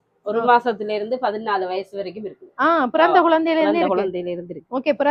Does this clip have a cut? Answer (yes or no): no